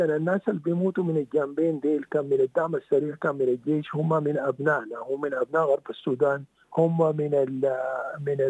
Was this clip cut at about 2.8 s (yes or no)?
no